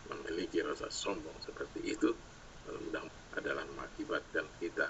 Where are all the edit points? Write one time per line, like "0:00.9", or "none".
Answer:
0:03.1